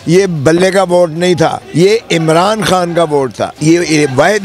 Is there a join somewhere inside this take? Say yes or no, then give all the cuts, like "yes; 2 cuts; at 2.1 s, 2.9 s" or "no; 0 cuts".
yes; 2 cuts; at 1.6 s, 3.4 s